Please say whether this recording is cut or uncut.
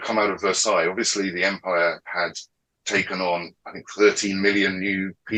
uncut